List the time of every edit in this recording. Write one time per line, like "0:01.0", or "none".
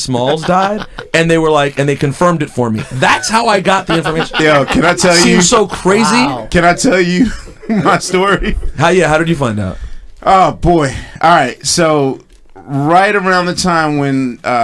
0:09.6